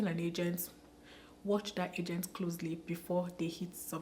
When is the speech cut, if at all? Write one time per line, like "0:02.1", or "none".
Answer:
none